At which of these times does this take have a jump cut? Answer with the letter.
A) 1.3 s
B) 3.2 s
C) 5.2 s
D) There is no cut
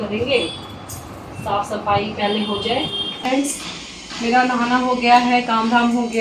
B